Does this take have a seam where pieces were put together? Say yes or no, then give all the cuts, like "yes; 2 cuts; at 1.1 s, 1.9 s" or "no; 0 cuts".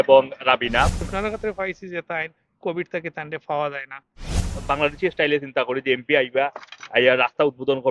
yes; 2 cuts; at 1.0 s, 4.6 s